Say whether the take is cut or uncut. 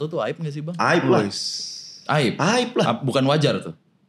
uncut